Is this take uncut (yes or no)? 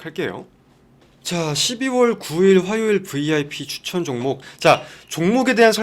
no